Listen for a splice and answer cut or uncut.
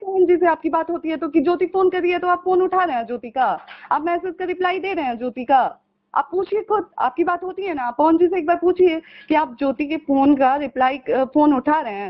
uncut